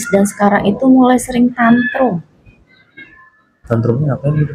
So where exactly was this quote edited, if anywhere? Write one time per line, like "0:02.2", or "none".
none